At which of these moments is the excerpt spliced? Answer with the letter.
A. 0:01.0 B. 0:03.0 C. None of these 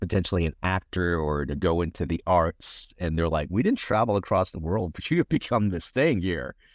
C